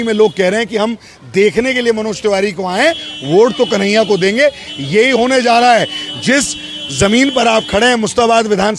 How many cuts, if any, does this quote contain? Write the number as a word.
zero